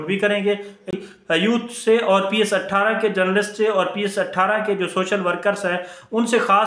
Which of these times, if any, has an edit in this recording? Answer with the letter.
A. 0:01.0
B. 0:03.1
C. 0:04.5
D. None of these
A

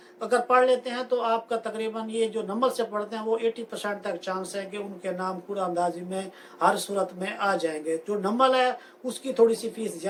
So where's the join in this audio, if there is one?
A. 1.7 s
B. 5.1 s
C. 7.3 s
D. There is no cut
D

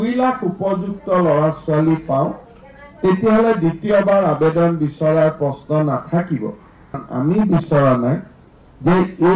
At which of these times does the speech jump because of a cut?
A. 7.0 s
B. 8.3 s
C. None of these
A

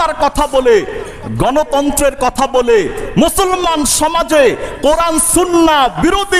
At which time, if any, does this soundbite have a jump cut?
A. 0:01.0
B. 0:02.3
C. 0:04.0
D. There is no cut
D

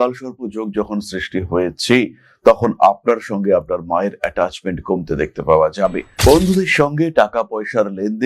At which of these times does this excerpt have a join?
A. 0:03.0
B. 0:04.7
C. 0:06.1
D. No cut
C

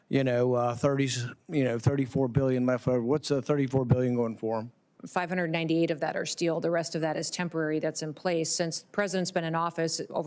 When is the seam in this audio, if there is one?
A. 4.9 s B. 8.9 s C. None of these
A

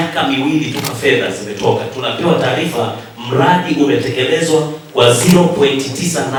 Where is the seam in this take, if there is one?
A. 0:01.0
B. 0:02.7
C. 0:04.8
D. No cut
D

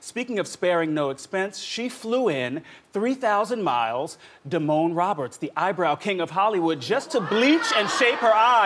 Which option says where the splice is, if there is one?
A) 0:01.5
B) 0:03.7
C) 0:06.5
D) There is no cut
B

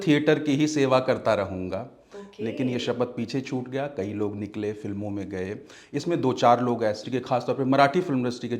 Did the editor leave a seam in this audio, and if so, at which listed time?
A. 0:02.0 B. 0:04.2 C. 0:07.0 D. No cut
C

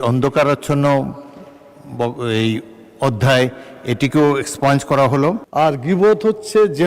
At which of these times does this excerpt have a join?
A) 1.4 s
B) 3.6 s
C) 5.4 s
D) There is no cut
C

